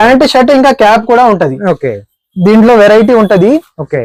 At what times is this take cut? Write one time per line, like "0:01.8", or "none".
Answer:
none